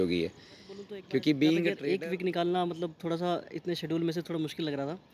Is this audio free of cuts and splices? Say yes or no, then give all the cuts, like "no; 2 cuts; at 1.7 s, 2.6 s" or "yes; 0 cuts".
no; 1 cut; at 1.8 s